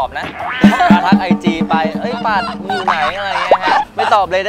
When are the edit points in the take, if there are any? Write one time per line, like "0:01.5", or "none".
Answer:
none